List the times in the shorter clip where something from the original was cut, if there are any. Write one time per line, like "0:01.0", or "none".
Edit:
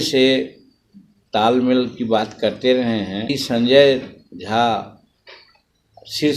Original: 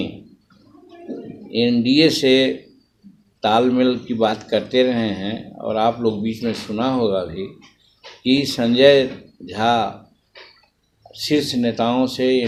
0:03.3